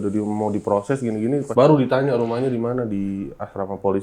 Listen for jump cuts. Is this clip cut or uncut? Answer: cut